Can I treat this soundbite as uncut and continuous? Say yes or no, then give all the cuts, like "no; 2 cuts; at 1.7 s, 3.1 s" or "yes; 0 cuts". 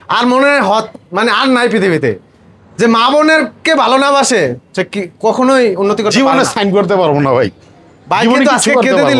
yes; 0 cuts